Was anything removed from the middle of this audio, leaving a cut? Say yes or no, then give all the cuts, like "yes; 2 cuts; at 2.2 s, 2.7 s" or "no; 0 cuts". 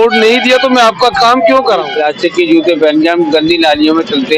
yes; 1 cut; at 1.9 s